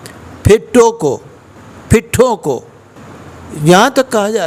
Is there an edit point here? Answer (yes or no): no